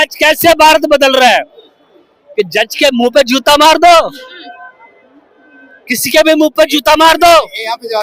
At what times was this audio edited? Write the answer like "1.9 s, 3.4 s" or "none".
none